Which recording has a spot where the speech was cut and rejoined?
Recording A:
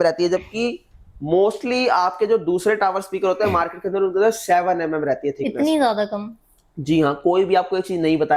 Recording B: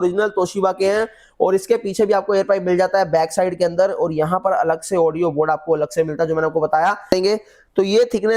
B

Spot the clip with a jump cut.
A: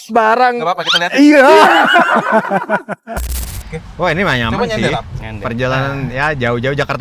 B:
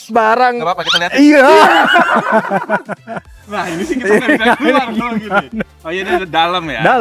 A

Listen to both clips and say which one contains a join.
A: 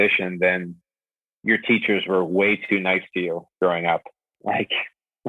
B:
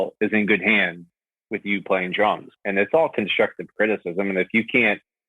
B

